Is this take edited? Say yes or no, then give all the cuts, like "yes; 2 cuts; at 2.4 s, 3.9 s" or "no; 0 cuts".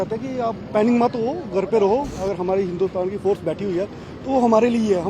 yes; 1 cut; at 2.1 s